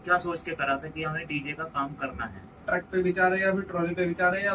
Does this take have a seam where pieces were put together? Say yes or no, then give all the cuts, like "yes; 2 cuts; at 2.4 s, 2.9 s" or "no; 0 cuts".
yes; 1 cut; at 2.6 s